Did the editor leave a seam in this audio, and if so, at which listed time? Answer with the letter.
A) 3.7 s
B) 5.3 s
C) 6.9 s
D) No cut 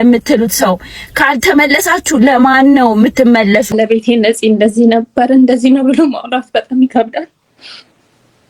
A